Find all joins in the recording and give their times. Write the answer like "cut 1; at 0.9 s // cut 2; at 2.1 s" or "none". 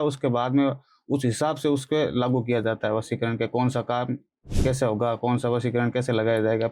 none